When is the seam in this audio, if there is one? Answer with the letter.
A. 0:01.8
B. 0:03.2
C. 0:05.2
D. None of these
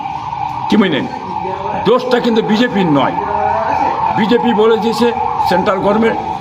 D